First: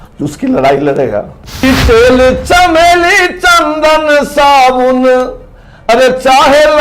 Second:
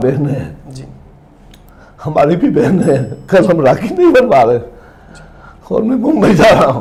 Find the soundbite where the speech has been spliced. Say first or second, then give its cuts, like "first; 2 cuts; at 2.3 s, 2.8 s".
first; 1 cut; at 1.6 s